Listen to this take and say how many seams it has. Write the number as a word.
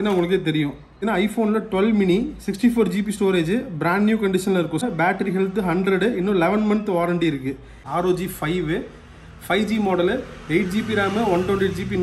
three